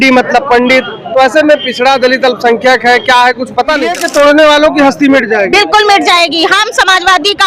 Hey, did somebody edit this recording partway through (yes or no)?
yes